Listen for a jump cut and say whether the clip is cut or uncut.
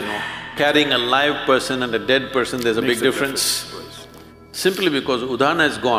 uncut